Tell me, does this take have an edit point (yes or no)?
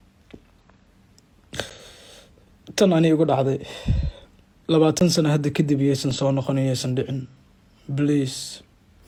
no